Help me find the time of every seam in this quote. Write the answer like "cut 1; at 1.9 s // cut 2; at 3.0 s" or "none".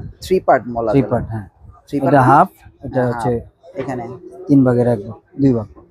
none